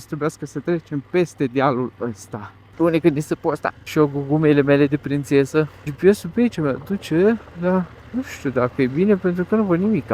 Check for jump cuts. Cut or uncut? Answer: cut